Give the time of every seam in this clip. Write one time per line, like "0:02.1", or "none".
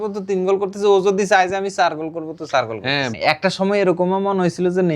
0:03.1